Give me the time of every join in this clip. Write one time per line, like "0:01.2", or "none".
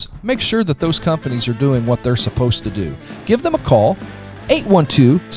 none